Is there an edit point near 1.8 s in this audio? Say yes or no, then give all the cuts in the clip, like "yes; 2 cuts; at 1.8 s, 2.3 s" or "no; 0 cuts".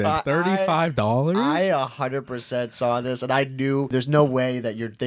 no; 1 cut; at 3.9 s